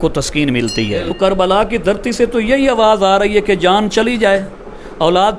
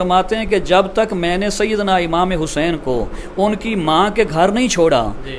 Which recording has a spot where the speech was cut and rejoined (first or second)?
first